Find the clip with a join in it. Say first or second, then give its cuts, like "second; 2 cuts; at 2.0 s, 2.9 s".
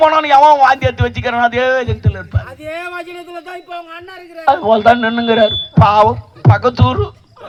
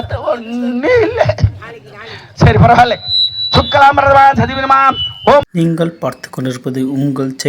second; 1 cut; at 5.5 s